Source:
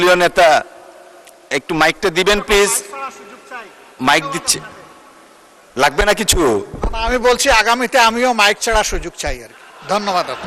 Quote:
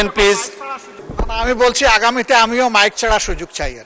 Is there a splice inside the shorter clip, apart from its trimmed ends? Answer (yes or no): yes